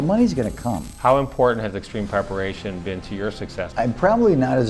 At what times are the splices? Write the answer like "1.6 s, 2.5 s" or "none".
0.9 s, 3.7 s

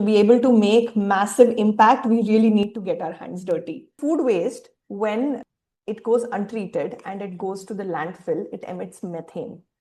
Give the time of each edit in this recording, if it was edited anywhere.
3.9 s, 5.5 s

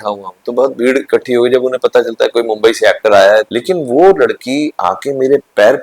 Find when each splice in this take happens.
3.5 s

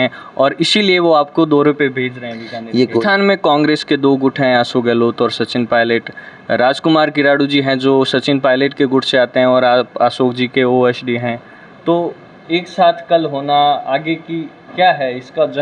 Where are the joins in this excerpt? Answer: 3.0 s

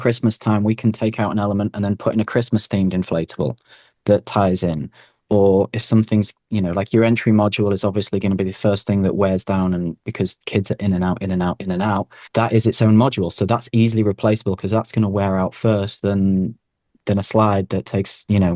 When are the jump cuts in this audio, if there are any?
12.2 s

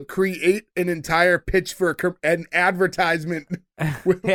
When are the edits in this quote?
none

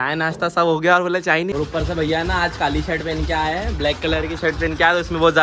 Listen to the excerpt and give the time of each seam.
1.5 s

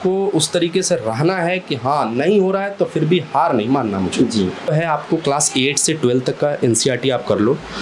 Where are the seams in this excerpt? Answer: 4.7 s

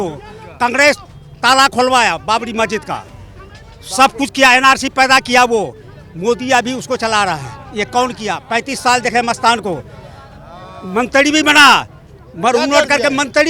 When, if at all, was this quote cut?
none

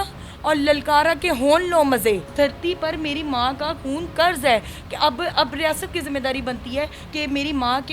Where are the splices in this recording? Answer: 2.3 s

